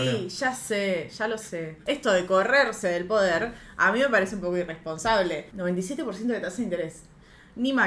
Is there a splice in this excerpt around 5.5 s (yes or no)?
yes